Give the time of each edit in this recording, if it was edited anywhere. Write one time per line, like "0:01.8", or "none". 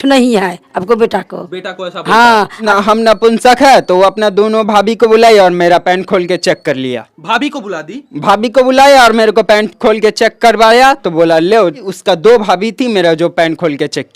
0:02.6
0:11.9